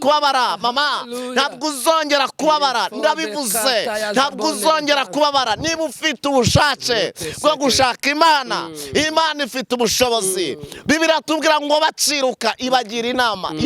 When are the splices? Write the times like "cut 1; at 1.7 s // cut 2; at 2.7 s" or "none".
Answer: none